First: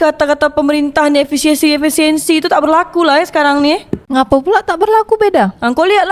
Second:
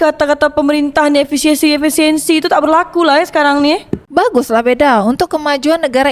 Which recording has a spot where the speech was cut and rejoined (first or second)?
second